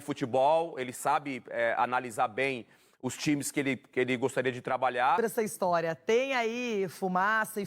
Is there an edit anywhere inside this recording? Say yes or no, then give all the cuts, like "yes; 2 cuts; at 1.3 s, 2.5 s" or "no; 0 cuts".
yes; 1 cut; at 5.2 s